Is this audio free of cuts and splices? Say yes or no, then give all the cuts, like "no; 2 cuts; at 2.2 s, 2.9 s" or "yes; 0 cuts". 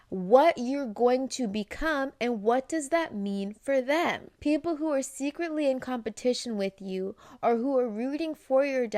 no; 1 cut; at 4.3 s